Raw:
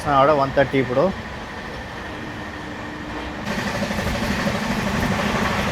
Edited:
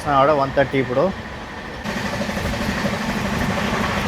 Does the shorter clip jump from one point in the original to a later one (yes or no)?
yes